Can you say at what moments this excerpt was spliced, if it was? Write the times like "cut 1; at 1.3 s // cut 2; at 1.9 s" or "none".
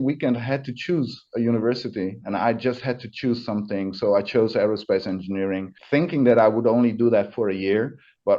cut 1; at 2.2 s // cut 2; at 5.7 s